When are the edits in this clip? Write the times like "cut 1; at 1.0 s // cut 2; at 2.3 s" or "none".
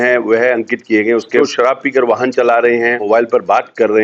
cut 1; at 1.4 s // cut 2; at 3.0 s